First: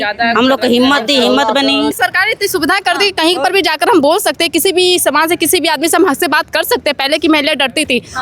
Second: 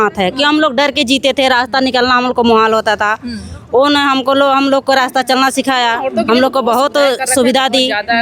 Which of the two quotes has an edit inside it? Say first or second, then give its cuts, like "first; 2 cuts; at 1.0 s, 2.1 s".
first; 1 cut; at 2.0 s